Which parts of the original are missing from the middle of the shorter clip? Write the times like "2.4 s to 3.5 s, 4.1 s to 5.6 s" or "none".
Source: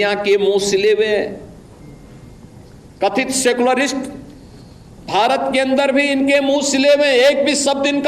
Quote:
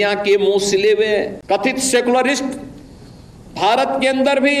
1.4 s to 2.9 s